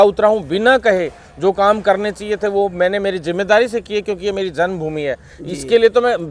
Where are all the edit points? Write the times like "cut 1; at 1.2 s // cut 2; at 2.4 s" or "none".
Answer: none